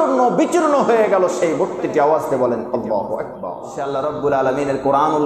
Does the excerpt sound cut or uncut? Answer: cut